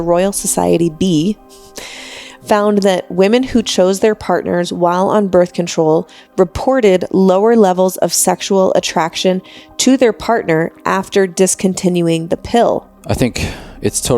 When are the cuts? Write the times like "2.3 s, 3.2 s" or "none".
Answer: 12.9 s